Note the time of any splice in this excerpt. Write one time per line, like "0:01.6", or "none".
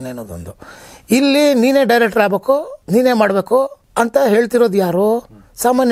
0:02.8
0:03.8